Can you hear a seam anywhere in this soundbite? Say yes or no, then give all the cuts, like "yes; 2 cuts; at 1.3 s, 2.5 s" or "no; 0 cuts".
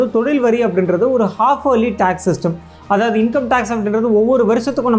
no; 0 cuts